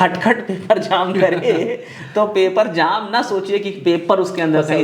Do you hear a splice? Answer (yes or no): no